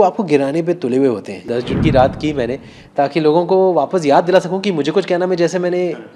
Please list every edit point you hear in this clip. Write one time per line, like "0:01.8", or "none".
0:01.5